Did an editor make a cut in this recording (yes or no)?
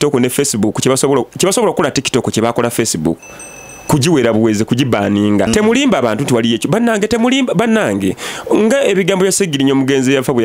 yes